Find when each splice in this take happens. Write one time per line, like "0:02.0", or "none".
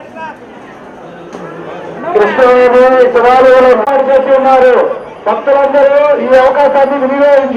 none